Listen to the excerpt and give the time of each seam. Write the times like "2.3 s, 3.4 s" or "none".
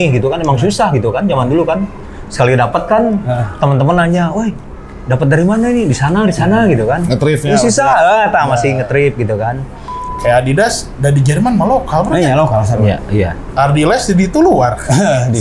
10.0 s